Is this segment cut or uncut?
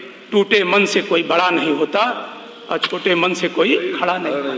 uncut